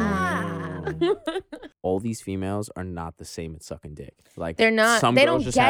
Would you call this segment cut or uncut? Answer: cut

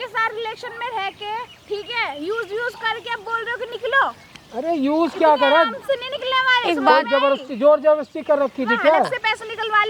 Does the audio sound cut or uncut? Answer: uncut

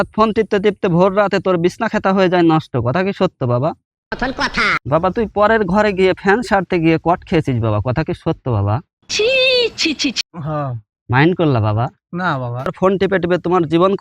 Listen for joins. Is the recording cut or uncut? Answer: cut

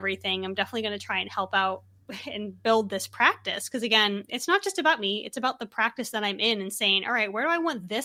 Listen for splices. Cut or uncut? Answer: uncut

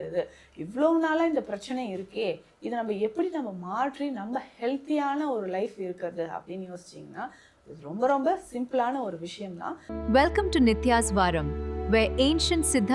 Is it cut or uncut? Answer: cut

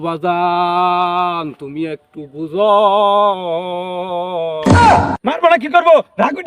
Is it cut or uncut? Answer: cut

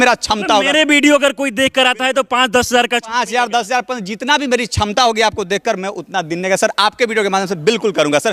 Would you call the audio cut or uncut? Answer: uncut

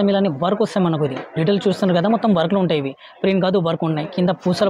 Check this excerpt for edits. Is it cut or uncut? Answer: uncut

